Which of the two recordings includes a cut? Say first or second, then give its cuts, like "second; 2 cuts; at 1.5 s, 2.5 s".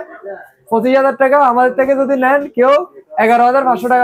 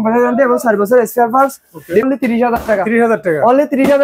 second; 1 cut; at 2.1 s